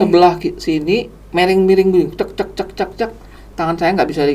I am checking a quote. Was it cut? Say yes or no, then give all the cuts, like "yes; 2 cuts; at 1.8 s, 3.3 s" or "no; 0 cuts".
yes; 1 cut; at 1.2 s